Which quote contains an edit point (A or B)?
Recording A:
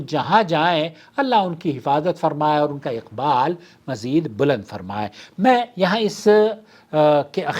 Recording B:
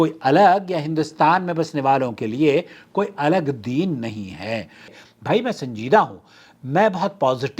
B